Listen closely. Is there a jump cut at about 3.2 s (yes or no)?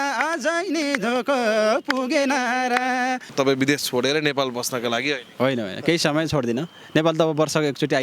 yes